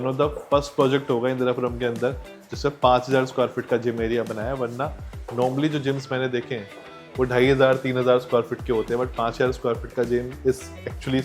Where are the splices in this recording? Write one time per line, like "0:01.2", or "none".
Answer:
none

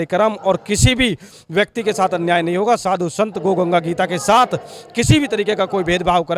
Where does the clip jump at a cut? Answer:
none

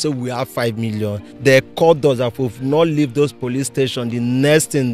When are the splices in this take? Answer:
0:01.3

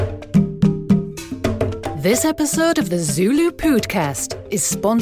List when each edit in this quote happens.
0:01.9

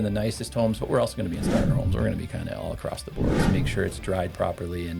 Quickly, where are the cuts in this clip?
0:03.4

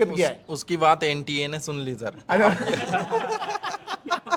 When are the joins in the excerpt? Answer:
none

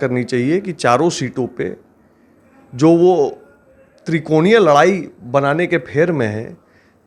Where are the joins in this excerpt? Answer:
none

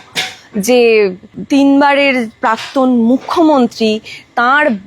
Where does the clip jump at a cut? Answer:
0:01.3

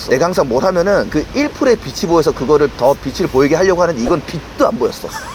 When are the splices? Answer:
0:02.7

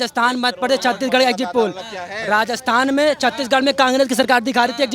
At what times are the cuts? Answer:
none

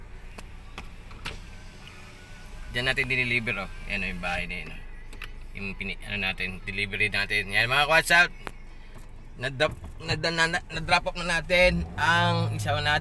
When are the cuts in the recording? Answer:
none

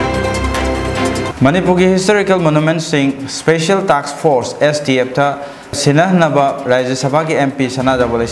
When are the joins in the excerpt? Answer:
0:00.9

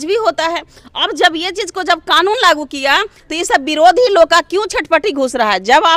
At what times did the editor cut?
none

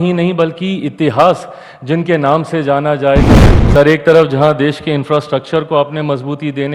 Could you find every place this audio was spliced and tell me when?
0:03.4

